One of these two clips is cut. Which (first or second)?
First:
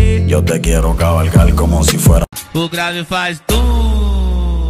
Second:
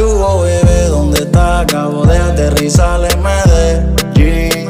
first